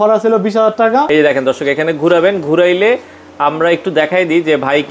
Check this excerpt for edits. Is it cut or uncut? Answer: cut